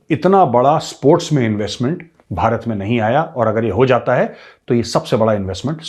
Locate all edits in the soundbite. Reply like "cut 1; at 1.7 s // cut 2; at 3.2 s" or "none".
none